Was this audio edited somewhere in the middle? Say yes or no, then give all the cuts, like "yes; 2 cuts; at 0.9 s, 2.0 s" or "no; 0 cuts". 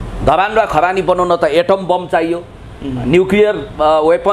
no; 0 cuts